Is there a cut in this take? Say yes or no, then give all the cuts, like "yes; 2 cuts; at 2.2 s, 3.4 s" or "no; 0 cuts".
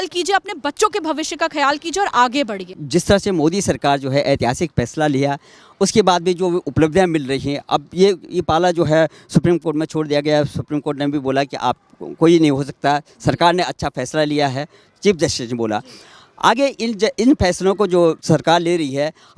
no; 0 cuts